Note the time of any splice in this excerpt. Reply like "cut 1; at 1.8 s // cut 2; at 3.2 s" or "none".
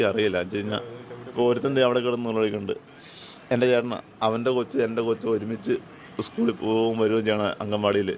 none